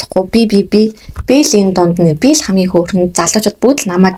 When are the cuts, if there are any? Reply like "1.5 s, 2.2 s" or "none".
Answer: none